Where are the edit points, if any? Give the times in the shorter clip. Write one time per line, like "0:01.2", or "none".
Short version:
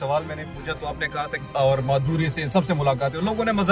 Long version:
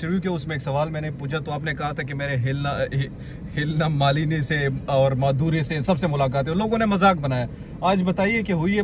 0:01.5